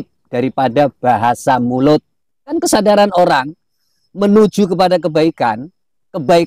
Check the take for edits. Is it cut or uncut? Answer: cut